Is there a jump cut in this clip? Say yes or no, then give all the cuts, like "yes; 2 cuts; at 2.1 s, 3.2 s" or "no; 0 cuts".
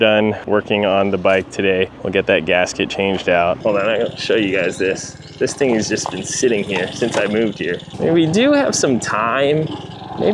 yes; 2 cuts; at 3.6 s, 7.9 s